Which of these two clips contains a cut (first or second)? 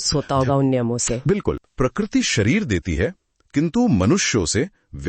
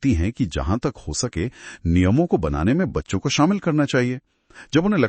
first